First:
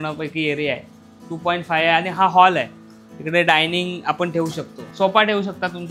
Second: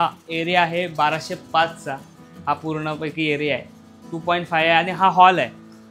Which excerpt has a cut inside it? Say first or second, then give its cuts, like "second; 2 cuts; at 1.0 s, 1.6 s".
first; 1 cut; at 4.7 s